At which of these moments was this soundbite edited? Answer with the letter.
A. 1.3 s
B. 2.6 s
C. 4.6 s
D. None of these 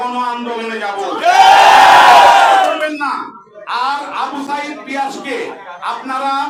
D